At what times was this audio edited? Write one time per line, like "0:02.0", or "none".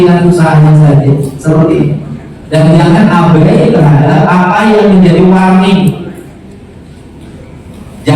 none